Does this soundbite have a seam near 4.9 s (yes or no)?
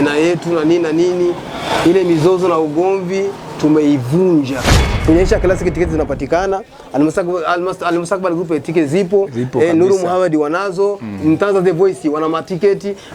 yes